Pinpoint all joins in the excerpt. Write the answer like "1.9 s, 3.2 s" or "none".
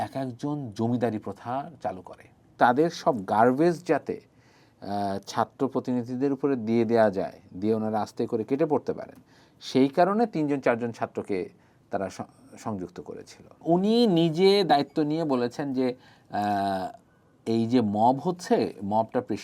2.5 s, 13.6 s